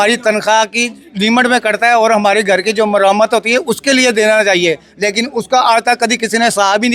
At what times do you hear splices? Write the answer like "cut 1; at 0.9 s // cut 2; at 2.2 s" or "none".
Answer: none

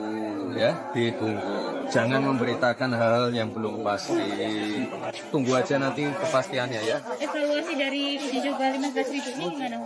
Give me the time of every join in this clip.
none

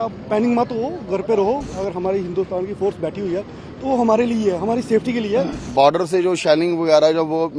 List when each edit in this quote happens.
cut 1; at 1.7 s // cut 2; at 5.7 s

